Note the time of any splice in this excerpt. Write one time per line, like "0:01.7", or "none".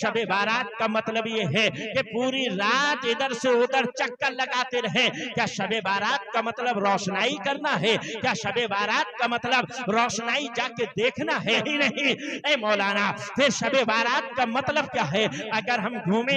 0:11.6

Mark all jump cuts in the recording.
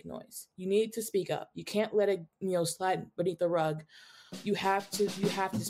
none

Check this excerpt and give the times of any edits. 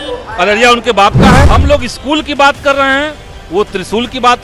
0:01.5

